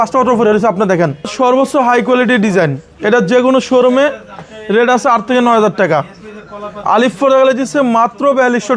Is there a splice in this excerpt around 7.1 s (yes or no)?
no